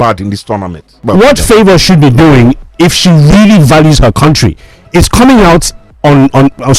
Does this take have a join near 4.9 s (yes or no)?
no